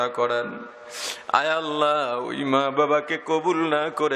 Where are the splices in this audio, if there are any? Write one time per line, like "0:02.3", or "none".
none